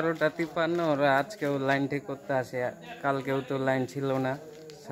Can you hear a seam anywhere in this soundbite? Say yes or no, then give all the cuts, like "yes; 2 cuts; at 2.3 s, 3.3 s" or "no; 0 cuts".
no; 0 cuts